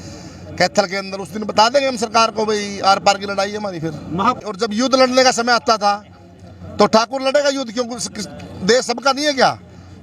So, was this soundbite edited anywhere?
yes; 1 cut; at 4.4 s

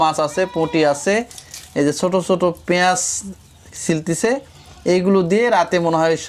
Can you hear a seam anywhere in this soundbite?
no; 0 cuts

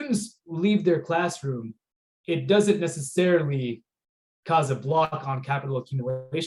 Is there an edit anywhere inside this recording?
no; 0 cuts

